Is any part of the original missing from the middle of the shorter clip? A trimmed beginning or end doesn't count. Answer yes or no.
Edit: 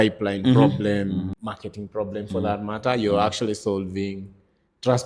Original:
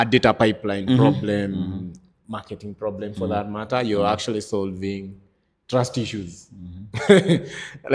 yes